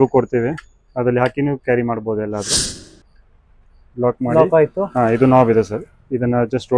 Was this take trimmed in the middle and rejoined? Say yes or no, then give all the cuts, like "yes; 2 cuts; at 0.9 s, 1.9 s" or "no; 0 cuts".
yes; 1 cut; at 2.5 s